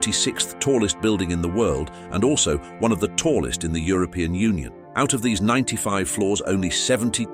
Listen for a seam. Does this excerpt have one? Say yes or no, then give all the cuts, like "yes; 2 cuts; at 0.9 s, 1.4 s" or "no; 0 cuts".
yes; 1 cut; at 4.8 s